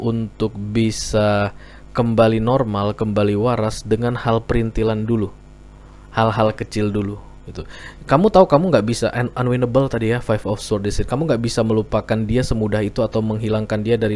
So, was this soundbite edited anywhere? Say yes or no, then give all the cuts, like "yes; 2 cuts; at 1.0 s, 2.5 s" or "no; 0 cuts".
no; 0 cuts